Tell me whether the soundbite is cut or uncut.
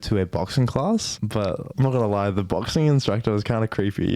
cut